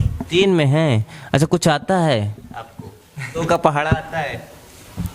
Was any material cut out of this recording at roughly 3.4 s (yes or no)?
yes